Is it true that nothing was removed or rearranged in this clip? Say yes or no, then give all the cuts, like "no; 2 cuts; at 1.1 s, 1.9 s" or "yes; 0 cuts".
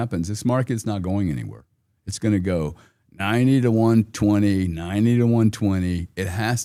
yes; 0 cuts